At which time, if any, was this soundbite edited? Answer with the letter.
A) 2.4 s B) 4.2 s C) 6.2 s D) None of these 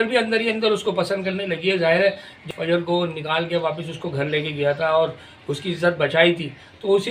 A